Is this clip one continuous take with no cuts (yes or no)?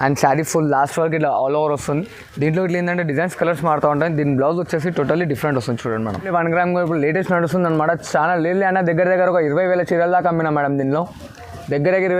no